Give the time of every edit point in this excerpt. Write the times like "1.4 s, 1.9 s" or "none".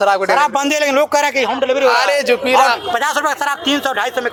none

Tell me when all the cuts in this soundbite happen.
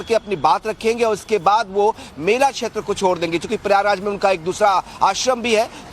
4.7 s

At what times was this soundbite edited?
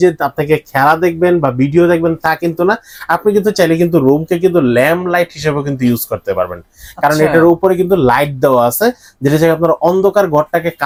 none

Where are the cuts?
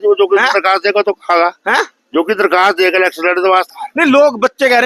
none

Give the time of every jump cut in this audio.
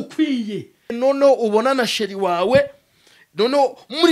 1.0 s

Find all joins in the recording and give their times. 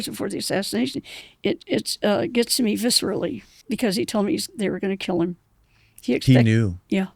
1.1 s, 3.5 s

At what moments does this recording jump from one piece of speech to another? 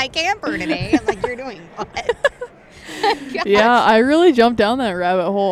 none

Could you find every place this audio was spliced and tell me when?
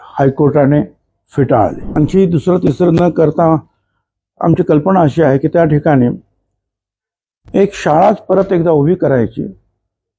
1.9 s

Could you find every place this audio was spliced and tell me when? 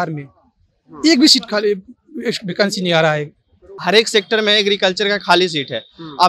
3.8 s

